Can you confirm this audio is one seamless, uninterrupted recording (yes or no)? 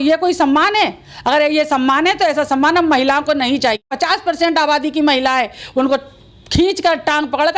no